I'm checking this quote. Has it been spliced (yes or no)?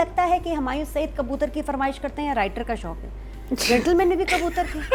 no